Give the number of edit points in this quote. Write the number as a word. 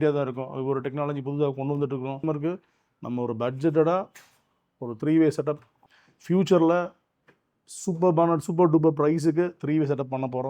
two